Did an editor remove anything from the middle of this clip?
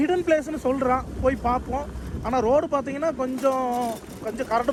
no; 0 cuts

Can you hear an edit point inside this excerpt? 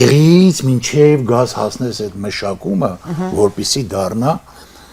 no; 0 cuts

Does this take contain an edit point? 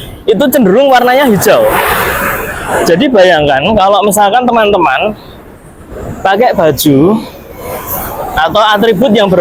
no; 0 cuts

